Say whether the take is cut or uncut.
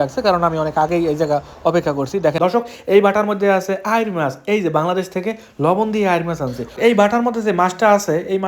cut